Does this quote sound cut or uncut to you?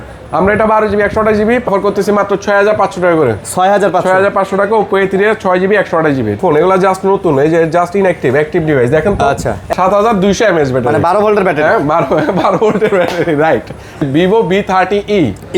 cut